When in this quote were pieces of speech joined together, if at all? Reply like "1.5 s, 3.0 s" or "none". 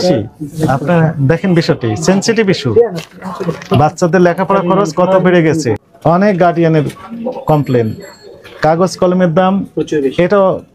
5.9 s